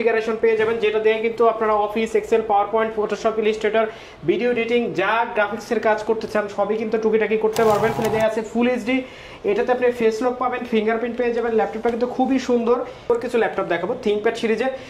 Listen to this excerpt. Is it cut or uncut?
cut